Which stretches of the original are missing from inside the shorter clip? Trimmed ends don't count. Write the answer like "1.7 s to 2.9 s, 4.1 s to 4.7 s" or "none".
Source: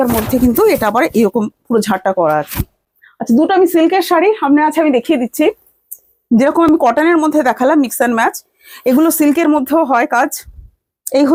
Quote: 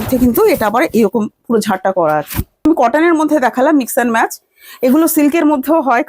2.9 s to 6.7 s